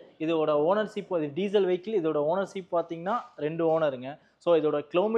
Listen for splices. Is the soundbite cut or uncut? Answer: uncut